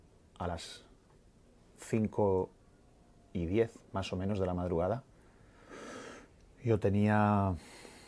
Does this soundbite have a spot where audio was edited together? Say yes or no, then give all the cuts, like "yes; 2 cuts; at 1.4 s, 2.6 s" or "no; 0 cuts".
yes; 1 cut; at 5.9 s